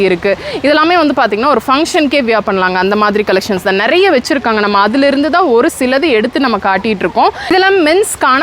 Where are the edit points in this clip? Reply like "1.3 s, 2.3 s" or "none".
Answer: 7.5 s